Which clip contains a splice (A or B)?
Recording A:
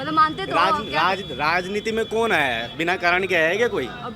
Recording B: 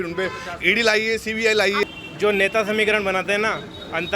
B